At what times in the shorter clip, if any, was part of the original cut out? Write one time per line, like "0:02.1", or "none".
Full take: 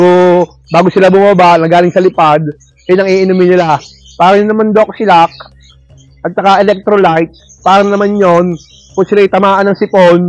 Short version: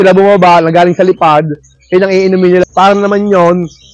0:02.7